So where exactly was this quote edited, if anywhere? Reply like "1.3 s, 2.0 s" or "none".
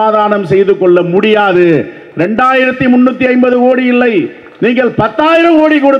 none

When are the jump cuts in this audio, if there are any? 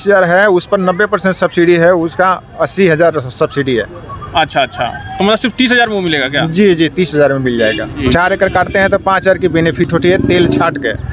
7.9 s

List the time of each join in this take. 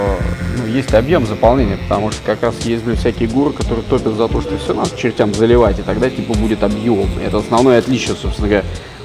none

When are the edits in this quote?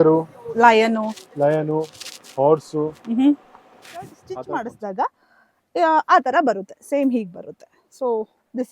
4.2 s

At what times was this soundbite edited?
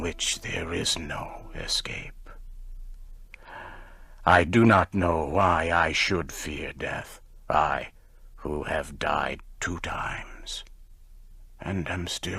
3.8 s

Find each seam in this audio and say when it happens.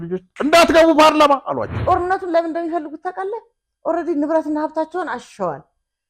1.7 s

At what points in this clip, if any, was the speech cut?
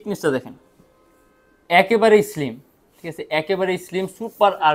none

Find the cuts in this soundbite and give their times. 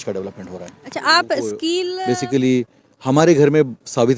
1.9 s

